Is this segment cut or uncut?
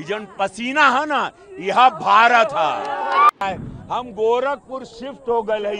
cut